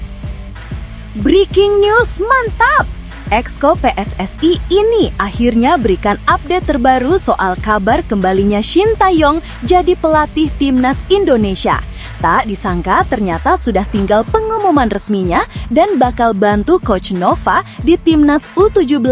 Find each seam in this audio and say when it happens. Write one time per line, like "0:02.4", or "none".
0:01.0